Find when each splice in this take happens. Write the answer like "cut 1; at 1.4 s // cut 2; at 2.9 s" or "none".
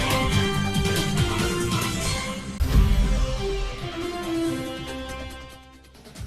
cut 1; at 2.6 s